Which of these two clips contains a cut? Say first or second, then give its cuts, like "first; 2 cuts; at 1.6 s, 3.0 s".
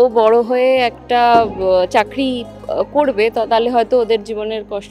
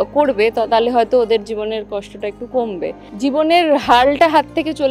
second; 1 cut; at 3.0 s